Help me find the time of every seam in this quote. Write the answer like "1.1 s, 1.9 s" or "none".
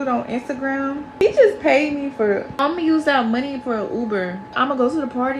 1.2 s, 2.6 s, 4.5 s

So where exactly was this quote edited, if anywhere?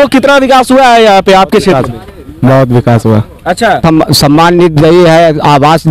3.8 s

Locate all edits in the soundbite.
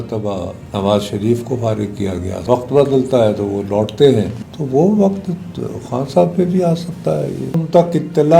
2.4 s, 4.4 s, 7.6 s

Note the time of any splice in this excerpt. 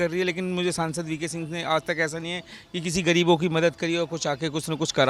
none

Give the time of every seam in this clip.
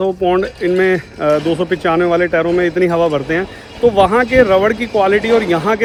none

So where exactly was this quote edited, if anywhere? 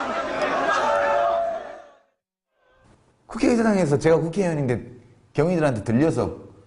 2.9 s

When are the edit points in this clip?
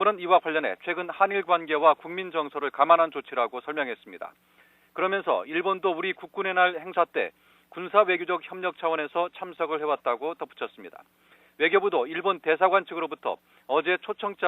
1.0 s

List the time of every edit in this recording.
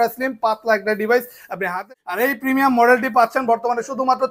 1.8 s

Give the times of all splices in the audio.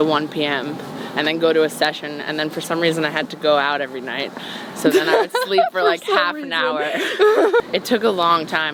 7.6 s

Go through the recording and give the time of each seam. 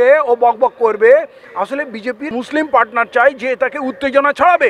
2.4 s

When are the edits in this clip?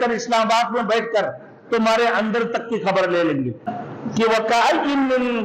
3.6 s

